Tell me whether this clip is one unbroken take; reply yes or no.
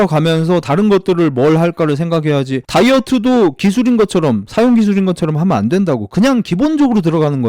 yes